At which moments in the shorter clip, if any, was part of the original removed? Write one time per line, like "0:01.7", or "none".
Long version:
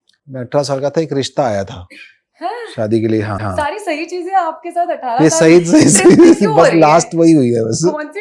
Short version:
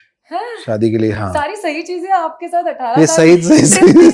0:01.2